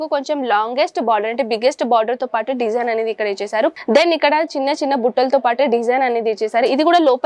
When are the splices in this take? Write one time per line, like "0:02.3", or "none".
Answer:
0:03.7